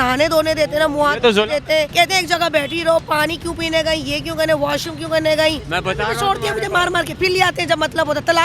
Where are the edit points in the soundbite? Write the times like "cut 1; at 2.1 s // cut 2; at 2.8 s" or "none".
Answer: cut 1; at 1.9 s // cut 2; at 5.6 s